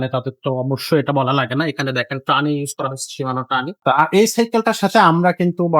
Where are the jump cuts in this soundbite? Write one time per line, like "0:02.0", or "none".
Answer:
0:03.8